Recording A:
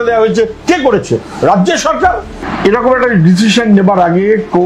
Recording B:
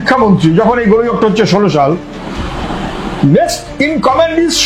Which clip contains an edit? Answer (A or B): A